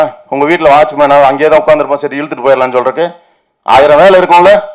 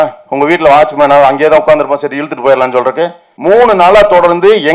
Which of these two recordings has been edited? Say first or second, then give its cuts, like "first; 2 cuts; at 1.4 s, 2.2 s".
second; 1 cut; at 3.2 s